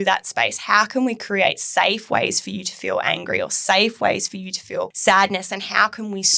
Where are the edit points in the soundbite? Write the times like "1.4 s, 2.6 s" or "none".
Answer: 4.9 s